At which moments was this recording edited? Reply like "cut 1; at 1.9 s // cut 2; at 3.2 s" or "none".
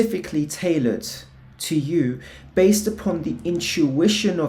none